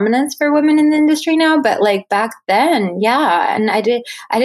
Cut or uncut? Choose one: uncut